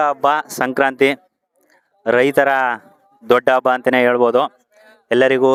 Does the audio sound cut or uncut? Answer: uncut